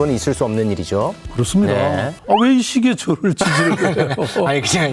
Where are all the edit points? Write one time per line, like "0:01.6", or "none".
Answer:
none